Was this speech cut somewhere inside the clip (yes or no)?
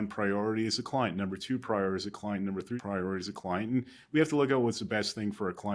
yes